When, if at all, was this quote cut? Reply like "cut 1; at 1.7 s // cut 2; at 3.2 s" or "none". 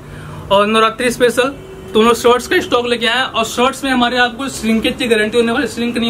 none